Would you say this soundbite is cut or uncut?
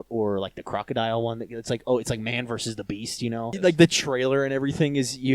cut